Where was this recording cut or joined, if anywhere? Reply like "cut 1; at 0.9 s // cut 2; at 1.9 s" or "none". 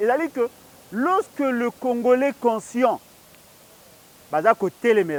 none